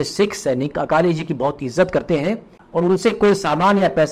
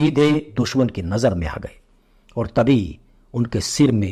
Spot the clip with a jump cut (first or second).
first